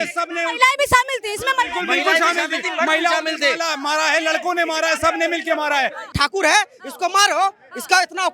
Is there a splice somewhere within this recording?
yes; 1 cut; at 6.1 s

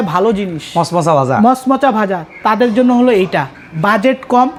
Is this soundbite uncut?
yes; 0 cuts

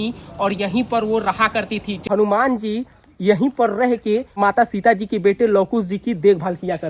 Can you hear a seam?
yes; 2 cuts; at 1.9 s, 4.3 s

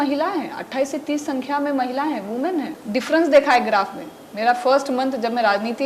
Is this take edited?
yes; 1 cut; at 2.8 s

